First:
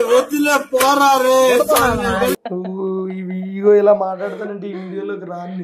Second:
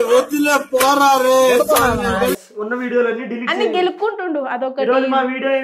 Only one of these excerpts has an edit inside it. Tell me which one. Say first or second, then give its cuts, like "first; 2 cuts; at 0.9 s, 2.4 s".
second; 1 cut; at 2.4 s